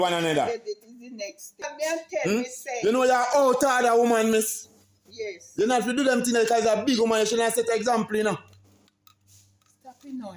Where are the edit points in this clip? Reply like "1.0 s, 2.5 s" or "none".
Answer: 1.7 s